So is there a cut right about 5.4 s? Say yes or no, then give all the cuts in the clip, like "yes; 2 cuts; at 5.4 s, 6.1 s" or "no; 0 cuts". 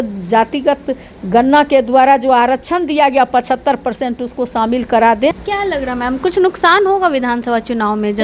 yes; 1 cut; at 5.4 s